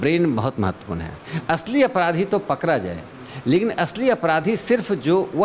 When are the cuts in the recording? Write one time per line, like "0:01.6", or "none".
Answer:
none